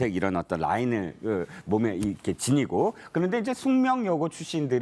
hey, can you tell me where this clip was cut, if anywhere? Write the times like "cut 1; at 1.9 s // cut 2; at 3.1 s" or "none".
none